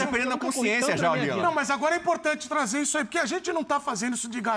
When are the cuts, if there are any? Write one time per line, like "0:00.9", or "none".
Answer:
none